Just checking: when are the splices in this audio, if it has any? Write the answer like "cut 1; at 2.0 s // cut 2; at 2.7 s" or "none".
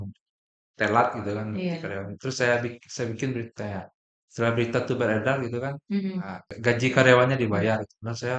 cut 1; at 6.5 s

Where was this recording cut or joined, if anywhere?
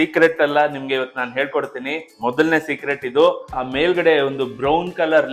cut 1; at 3.4 s

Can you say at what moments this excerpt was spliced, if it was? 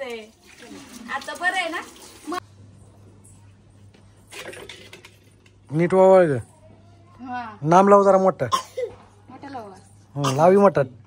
cut 1; at 2.4 s

